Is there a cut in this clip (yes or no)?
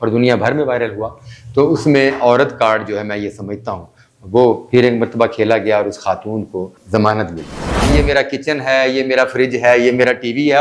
yes